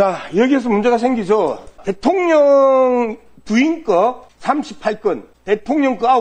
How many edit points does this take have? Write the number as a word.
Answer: three